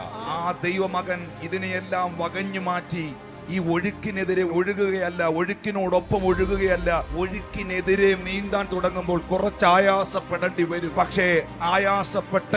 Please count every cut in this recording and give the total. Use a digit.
3